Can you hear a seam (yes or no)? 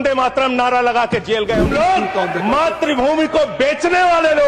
yes